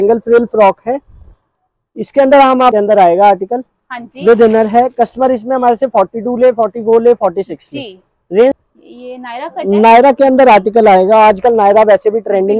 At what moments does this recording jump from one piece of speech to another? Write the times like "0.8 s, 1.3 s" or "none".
2.7 s, 8.6 s